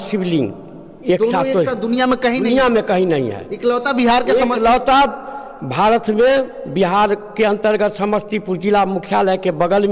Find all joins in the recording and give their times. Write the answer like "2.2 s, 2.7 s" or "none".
none